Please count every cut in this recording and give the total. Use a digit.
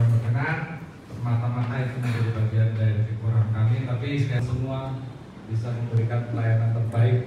1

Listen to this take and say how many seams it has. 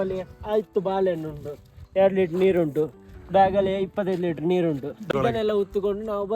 1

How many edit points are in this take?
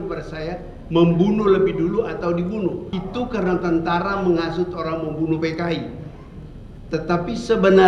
1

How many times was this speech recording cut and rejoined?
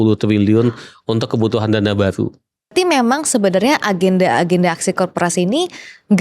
1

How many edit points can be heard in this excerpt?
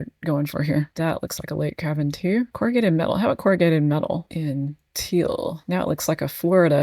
0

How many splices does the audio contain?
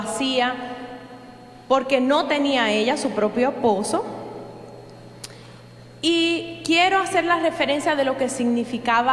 1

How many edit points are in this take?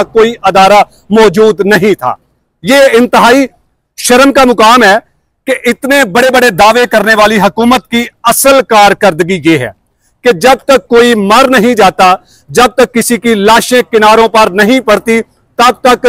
0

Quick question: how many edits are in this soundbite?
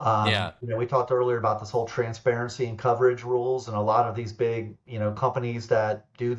0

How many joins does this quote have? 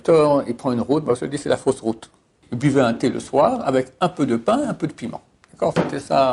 1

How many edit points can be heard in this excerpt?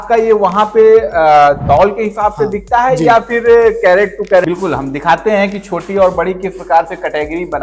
1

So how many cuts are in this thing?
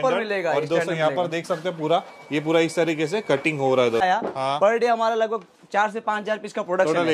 1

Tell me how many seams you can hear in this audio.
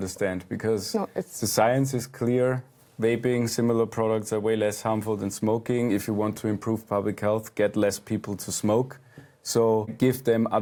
0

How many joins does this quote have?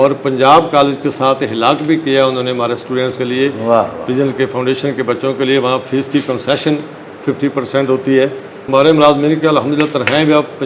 1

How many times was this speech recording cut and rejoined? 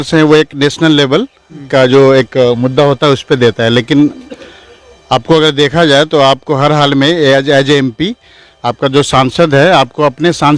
0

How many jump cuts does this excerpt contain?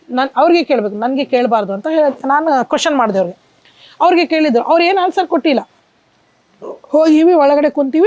0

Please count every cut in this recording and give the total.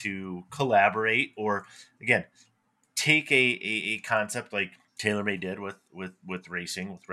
1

